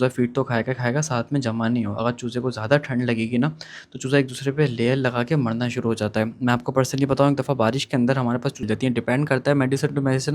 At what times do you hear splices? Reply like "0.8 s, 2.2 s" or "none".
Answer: 8.6 s